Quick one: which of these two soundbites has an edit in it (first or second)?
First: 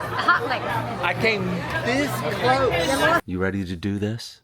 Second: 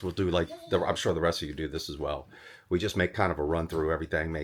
first